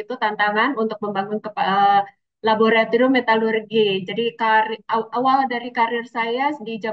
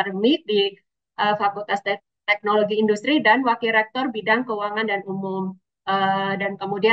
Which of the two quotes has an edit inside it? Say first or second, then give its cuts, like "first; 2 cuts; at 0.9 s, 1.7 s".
second; 1 cut; at 5.7 s